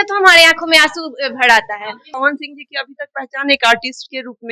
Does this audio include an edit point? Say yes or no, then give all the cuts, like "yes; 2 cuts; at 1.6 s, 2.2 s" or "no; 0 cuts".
yes; 1 cut; at 2.2 s